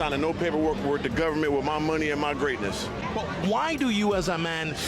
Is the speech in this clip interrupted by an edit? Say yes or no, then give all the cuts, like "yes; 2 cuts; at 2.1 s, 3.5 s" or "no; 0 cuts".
no; 0 cuts